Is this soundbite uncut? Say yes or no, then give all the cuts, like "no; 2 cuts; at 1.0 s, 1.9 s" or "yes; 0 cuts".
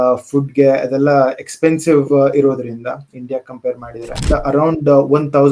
no; 1 cut; at 4.2 s